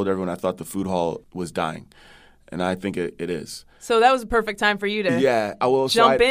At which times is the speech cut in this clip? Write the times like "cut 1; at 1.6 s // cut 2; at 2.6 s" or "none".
none

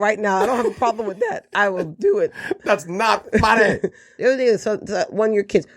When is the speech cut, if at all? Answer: cut 1; at 4.1 s

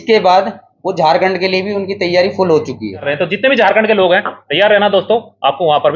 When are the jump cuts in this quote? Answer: cut 1; at 3.1 s

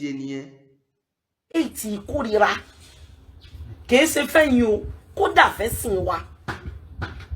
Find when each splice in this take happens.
cut 1; at 1.5 s

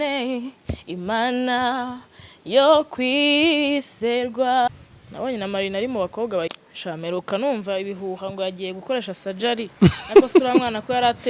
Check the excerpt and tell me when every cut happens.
cut 1; at 4.7 s // cut 2; at 6.7 s

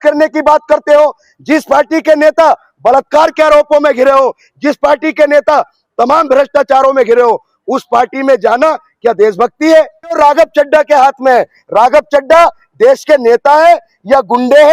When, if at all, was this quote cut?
cut 1; at 10.2 s

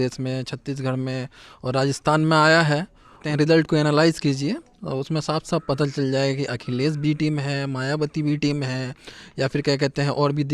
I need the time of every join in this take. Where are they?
cut 1; at 3.3 s

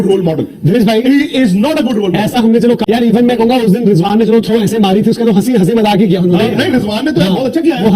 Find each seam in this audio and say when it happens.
cut 1; at 2.8 s

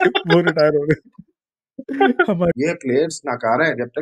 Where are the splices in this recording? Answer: cut 1; at 2.5 s

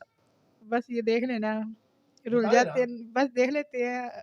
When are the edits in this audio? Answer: none

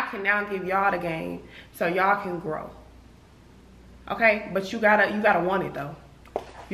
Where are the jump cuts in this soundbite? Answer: none

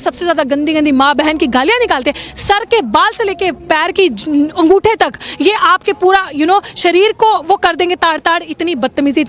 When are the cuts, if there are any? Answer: none

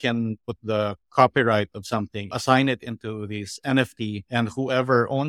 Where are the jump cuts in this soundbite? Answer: cut 1; at 2.3 s

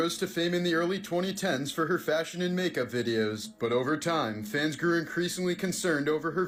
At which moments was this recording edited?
none

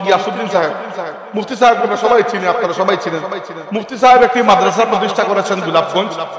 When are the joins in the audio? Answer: none

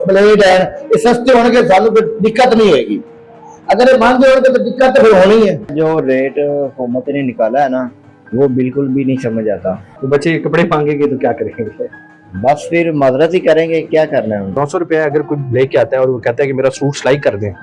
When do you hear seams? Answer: cut 1; at 5.7 s // cut 2; at 9.9 s // cut 3; at 14.6 s

